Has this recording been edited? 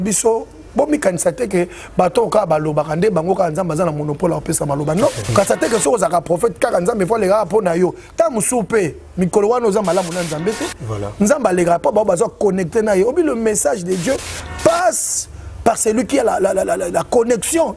yes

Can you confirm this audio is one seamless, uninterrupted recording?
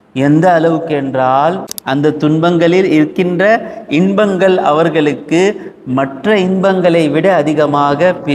no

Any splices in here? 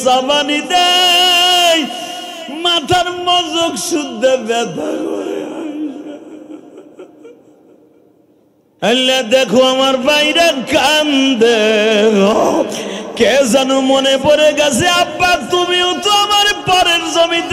yes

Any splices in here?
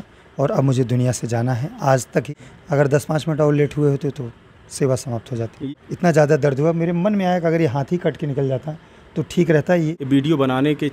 yes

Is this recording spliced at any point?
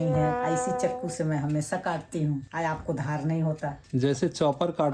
no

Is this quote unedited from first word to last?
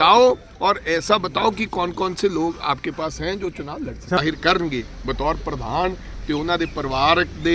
no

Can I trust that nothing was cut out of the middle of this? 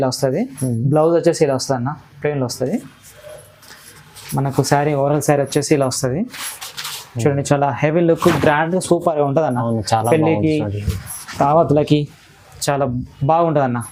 yes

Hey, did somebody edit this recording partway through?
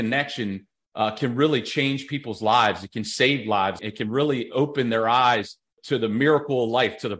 yes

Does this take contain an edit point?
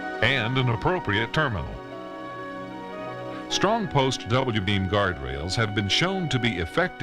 yes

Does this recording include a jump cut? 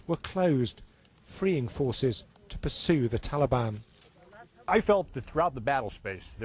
no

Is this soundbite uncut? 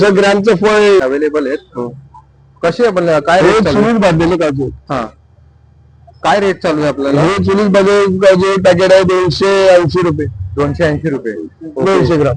no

